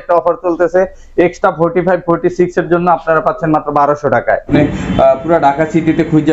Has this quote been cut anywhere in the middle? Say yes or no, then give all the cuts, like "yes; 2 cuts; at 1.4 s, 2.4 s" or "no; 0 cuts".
yes; 1 cut; at 4.5 s